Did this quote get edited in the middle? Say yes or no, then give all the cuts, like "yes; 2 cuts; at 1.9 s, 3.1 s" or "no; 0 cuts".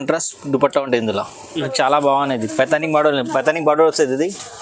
yes; 1 cut; at 1.7 s